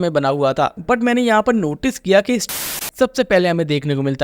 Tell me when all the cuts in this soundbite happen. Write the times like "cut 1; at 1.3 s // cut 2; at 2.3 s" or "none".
cut 1; at 2.6 s